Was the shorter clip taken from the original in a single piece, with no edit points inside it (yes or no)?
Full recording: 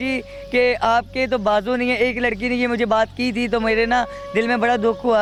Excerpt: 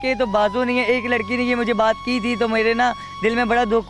yes